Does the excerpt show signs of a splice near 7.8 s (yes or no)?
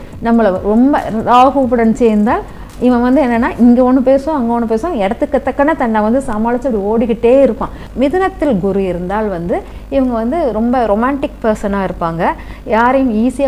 yes